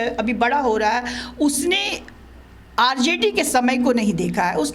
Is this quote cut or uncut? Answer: uncut